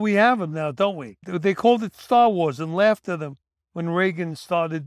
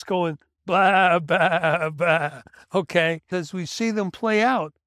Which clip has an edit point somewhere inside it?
second; 1 cut; at 3.3 s

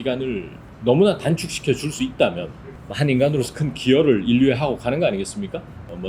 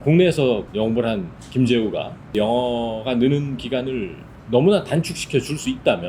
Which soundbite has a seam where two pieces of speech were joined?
second; 1 cut; at 2.3 s

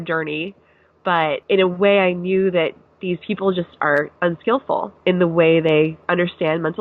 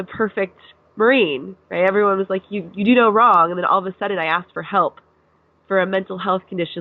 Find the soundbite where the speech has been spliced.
first; 3 cuts; at 1.4 s, 4.9 s, 6.0 s

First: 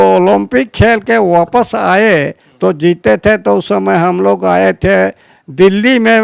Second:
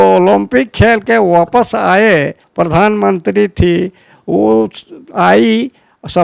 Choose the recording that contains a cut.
second; 1 cut; at 2.4 s

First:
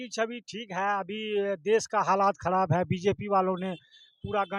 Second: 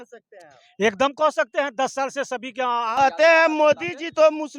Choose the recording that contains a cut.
second; 1 cut; at 2.9 s

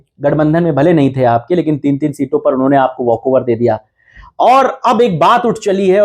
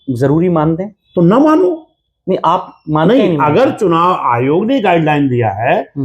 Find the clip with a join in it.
second; 1 cut; at 1.0 s

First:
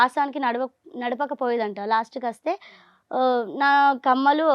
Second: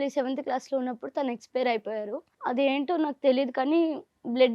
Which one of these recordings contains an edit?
second; 1 cut; at 2.3 s

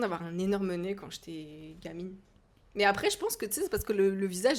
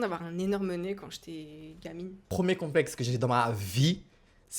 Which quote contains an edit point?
second; 1 cut; at 2.3 s

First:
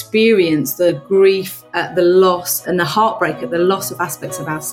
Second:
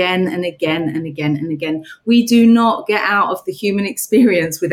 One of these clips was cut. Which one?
first; 2 cuts; at 0.9 s, 2.5 s

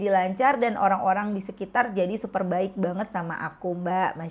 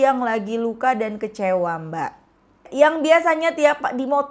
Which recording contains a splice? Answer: second; 1 cut; at 2.7 s

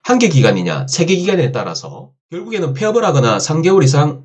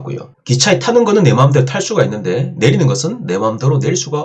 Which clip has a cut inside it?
first; 1 cut; at 2.4 s

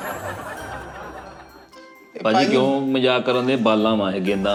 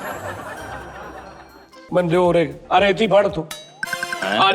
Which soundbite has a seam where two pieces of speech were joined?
second; 1 cut; at 1.8 s

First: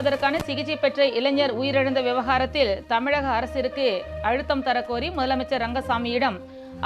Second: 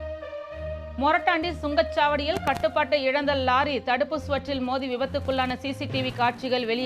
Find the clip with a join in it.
second; 1 cut; at 0.9 s

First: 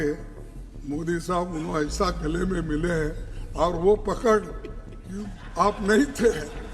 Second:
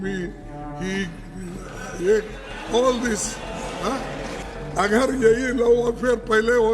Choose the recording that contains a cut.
second; 1 cut; at 4.4 s

